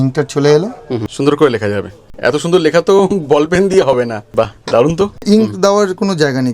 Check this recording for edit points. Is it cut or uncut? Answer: cut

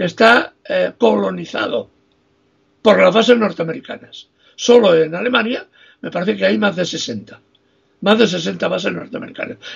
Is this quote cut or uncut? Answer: uncut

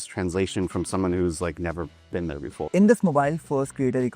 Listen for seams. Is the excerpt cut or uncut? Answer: cut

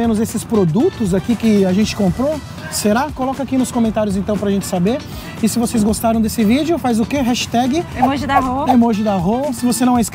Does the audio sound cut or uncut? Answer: uncut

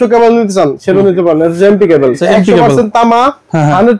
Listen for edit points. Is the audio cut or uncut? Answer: cut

